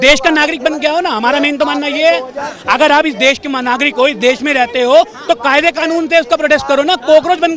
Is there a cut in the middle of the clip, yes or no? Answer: no